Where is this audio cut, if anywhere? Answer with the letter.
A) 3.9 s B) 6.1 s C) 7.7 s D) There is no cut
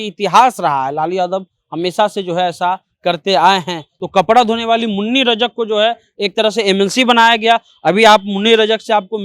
A